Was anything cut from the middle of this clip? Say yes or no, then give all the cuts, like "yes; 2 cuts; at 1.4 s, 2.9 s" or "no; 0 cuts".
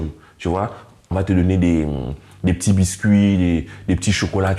yes; 1 cut; at 1.1 s